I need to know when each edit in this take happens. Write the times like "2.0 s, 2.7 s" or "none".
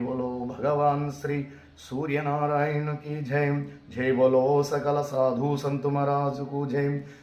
none